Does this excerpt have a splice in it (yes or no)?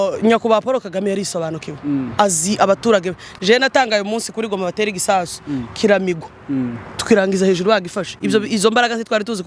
no